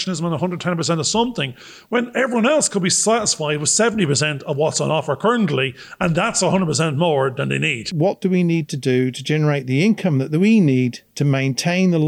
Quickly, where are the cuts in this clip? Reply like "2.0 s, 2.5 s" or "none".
7.9 s